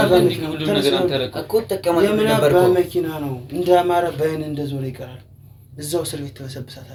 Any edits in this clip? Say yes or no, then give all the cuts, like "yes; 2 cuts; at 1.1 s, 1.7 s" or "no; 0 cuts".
no; 0 cuts